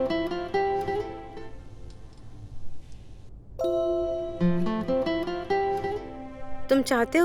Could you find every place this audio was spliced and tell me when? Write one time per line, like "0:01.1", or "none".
0:01.0